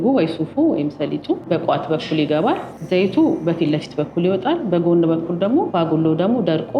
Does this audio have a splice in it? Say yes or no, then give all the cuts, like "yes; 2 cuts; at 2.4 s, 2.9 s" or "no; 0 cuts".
yes; 3 cuts; at 1.4 s, 2.8 s, 5.7 s